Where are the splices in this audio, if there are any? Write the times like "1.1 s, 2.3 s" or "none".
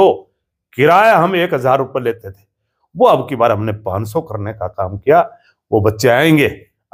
none

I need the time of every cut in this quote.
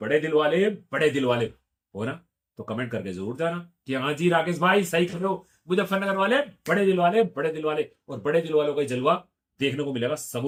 none

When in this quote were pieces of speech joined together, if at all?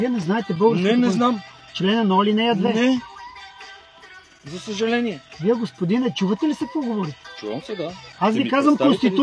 1.5 s, 3.1 s, 5.3 s, 8.0 s

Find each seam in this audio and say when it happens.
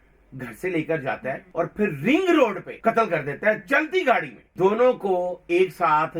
1.4 s, 2.7 s, 4.4 s

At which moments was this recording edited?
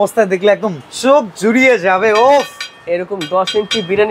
none

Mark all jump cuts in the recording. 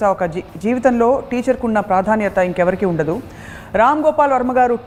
none

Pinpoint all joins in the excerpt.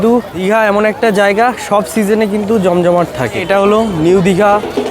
0.9 s, 3.4 s

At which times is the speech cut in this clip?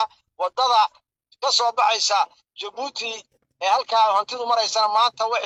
none

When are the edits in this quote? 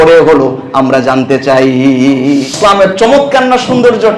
2.5 s

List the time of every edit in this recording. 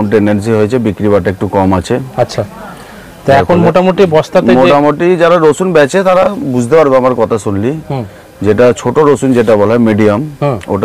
none

